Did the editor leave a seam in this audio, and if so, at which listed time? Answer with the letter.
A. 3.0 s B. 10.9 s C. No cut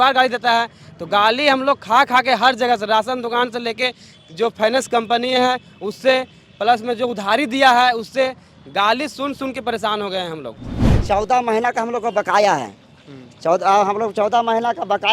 B